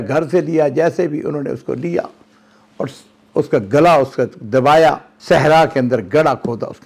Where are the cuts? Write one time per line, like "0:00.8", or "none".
0:05.1